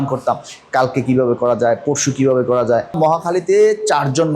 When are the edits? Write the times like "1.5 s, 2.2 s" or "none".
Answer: 2.9 s